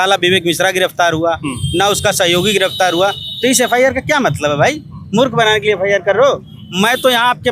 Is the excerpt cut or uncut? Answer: uncut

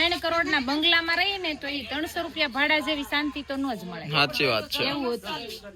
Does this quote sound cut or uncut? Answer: uncut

